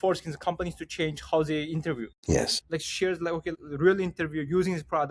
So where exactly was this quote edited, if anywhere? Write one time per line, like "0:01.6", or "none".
0:02.2
0:03.5